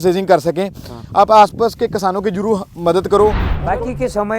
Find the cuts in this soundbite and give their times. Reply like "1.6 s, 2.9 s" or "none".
3.5 s